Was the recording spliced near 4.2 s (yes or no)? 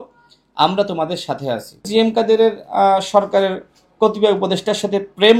no